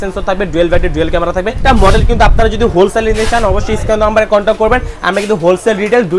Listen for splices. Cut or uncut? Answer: cut